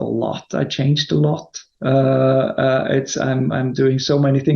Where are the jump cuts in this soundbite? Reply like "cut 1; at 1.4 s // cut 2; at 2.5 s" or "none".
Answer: none

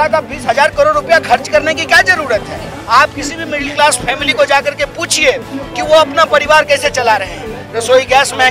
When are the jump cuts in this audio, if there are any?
cut 1; at 2.7 s

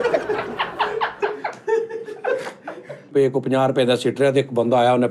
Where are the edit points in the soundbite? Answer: cut 1; at 3.1 s

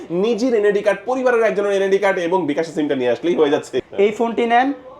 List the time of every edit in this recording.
cut 1; at 3.8 s

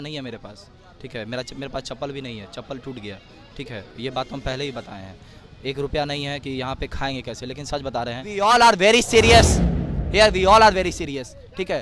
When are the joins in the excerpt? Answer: cut 1; at 8.2 s

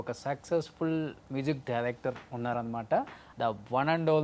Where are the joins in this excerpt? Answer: cut 1; at 3.2 s

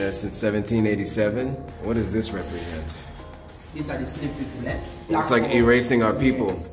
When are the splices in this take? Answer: cut 1; at 1.7 s // cut 2; at 5.1 s

